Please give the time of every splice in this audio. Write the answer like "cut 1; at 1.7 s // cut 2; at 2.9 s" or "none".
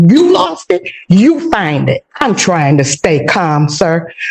cut 1; at 2.1 s